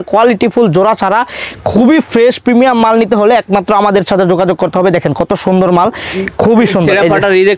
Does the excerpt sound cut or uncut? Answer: uncut